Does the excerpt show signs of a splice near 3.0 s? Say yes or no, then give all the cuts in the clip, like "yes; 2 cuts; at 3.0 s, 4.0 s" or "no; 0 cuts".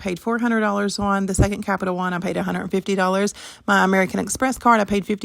no; 1 cut; at 1.6 s